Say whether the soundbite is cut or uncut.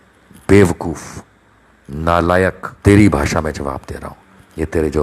cut